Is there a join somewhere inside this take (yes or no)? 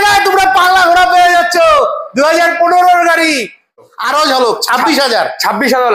yes